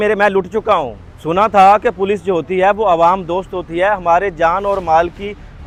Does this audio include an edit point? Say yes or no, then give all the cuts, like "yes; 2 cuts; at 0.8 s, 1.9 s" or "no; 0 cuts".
no; 0 cuts